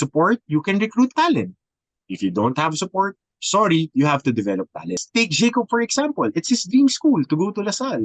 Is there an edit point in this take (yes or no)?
yes